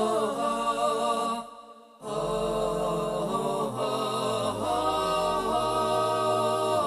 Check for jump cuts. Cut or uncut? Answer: cut